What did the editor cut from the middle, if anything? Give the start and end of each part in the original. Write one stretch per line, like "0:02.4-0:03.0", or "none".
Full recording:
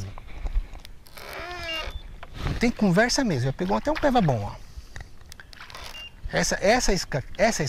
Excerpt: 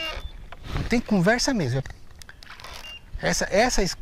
0:03.5-0:04.9